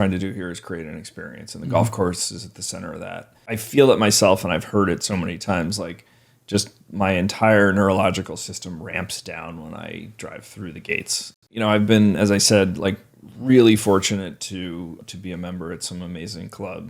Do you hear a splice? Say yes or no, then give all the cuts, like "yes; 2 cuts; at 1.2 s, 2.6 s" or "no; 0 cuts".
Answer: yes; 3 cuts; at 3.6 s, 11.4 s, 15.0 s